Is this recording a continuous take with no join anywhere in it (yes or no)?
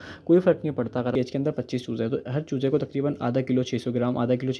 no